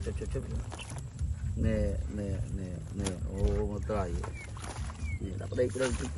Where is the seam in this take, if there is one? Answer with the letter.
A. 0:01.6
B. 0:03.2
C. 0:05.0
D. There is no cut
D